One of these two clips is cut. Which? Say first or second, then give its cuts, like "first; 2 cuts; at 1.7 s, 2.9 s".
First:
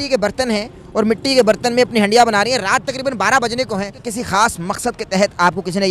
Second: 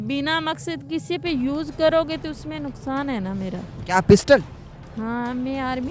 first; 1 cut; at 4.0 s